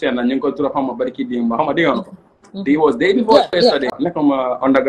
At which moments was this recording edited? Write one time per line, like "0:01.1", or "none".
0:03.9